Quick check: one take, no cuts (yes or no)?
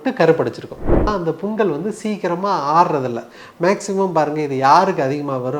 no